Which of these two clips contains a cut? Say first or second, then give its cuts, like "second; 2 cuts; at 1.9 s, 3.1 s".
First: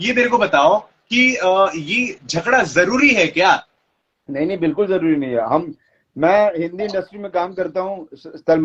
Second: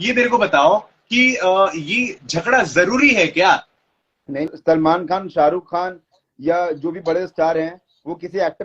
second; 1 cut; at 4.5 s